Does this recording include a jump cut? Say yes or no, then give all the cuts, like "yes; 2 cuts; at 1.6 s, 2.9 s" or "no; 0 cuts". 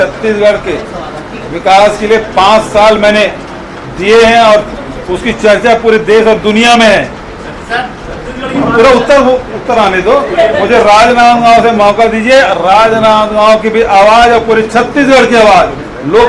no; 0 cuts